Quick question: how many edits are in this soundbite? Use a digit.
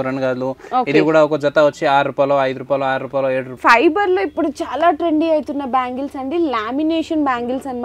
1